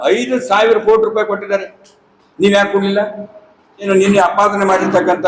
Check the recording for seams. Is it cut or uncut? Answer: cut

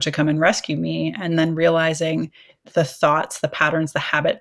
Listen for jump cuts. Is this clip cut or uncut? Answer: cut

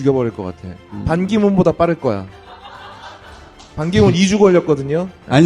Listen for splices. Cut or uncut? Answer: uncut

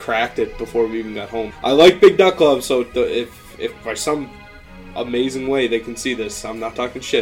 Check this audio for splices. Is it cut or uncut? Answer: cut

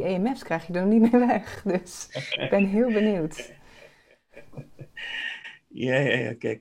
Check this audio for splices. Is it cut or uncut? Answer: uncut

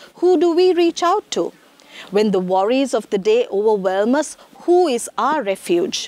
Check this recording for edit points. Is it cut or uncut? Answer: uncut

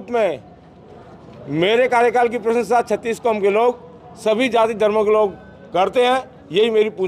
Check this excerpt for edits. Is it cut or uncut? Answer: uncut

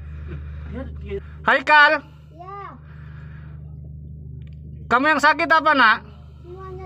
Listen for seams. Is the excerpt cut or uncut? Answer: cut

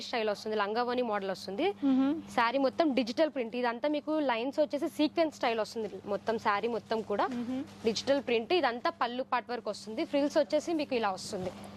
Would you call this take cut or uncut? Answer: uncut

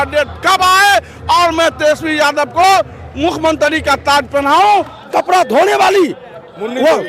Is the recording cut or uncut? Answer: cut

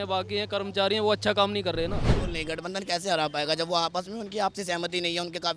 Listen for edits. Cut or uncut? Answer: cut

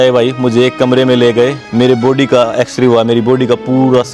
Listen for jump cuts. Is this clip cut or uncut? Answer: cut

